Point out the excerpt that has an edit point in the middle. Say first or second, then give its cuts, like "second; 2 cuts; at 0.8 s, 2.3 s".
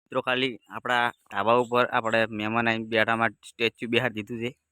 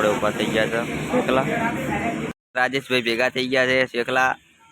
second; 1 cut; at 2.3 s